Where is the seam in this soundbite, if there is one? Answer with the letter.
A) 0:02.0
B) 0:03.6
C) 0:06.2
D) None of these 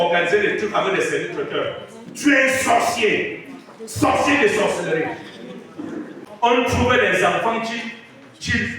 C